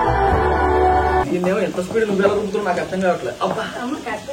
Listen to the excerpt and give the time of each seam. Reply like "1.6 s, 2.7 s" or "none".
1.3 s